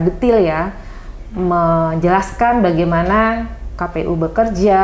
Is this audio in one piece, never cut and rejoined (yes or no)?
yes